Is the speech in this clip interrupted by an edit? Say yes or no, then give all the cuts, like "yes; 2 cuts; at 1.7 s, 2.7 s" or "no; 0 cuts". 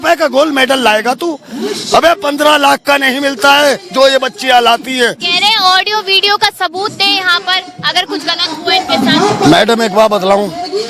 no; 0 cuts